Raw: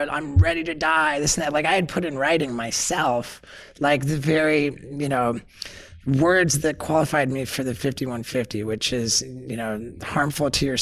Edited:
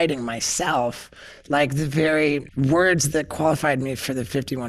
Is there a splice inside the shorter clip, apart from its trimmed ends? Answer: yes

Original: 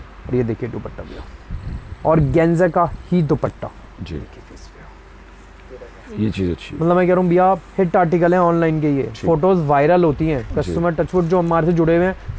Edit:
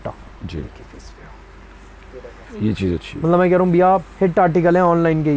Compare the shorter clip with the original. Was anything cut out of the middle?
no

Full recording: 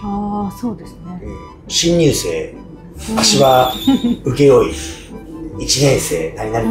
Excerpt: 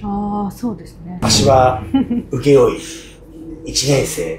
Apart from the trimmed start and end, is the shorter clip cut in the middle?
yes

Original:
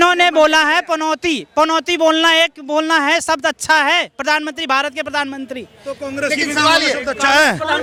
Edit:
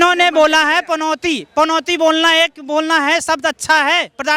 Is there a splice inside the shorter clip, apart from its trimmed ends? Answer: no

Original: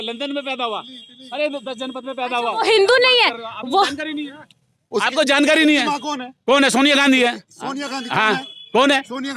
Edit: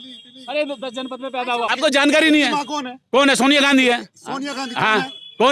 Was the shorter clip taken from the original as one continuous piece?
no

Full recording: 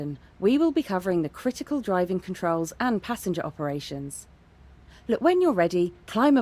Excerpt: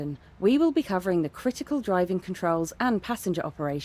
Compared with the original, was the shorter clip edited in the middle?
no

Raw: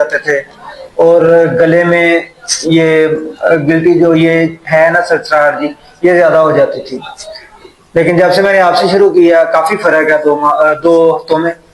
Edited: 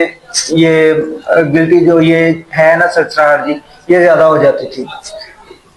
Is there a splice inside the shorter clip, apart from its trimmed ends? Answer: no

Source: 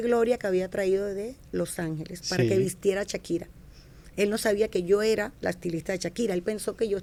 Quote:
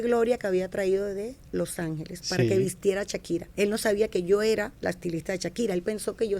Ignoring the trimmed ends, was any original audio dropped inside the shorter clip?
yes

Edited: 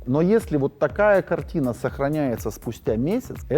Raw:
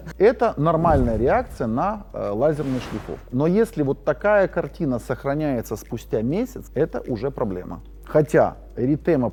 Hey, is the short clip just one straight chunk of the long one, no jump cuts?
yes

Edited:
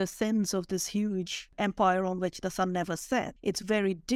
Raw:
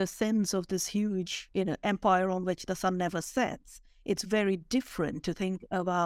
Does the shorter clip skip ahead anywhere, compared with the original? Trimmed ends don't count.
yes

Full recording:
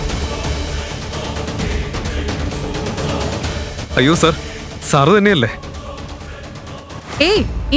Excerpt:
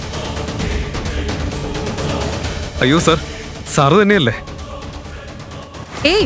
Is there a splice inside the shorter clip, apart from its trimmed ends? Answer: yes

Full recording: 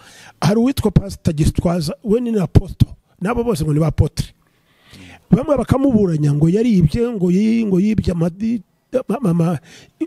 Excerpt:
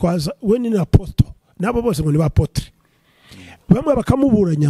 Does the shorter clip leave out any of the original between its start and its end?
no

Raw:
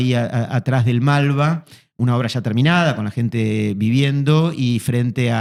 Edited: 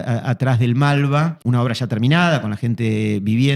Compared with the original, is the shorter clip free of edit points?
no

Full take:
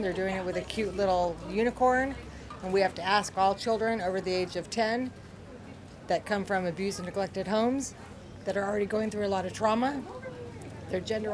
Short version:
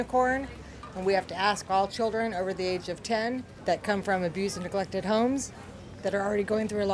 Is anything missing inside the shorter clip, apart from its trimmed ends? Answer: yes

